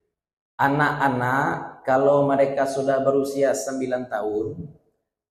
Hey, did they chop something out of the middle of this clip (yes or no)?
no